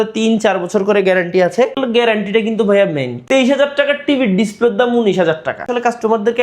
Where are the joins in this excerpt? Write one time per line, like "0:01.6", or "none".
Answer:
0:01.8
0:03.1
0:05.7